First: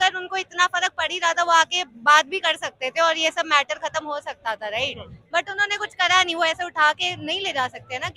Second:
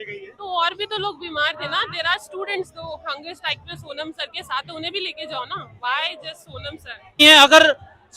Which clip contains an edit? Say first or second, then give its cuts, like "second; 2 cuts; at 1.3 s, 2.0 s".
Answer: second; 1 cut; at 7.2 s